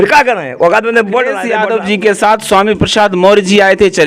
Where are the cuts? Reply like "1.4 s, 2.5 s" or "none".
1.4 s

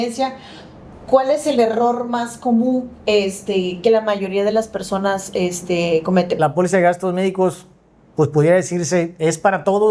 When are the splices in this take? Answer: 6.3 s

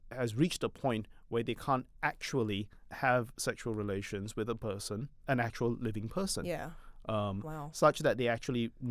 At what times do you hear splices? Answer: 2.8 s, 5.1 s

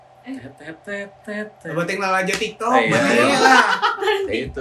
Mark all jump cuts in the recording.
none

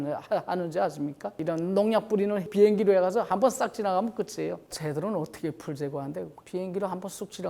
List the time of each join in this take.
1.4 s, 2.5 s, 4.6 s

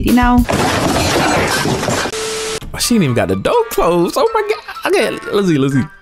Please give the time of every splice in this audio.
2.2 s

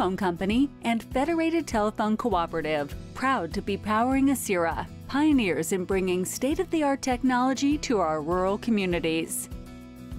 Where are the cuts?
9.3 s

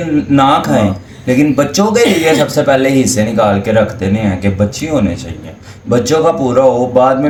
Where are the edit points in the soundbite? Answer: none

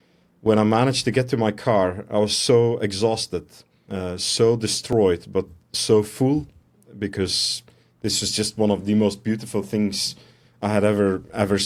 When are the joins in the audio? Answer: none

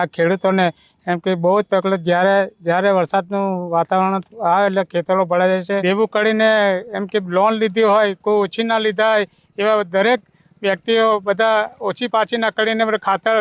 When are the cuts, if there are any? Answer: 5.8 s

